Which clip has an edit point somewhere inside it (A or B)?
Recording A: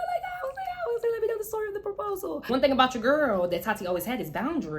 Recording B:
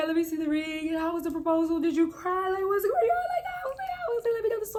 A